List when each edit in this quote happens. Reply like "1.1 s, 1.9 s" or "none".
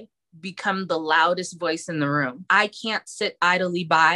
2.5 s